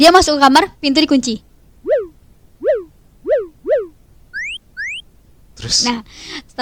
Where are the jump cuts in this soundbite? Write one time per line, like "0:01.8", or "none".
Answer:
none